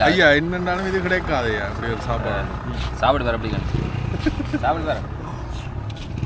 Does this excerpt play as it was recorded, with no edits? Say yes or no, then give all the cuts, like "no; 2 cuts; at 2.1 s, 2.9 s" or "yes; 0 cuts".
yes; 0 cuts